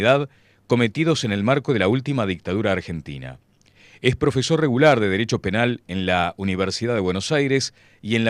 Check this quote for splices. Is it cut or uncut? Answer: cut